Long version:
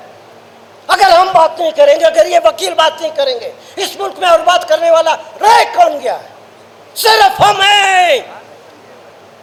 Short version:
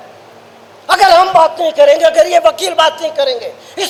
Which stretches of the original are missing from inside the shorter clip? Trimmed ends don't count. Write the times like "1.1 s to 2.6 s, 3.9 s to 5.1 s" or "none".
none